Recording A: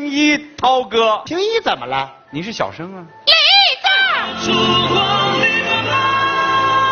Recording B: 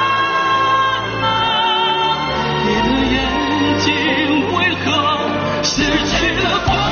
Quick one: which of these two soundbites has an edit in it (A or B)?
A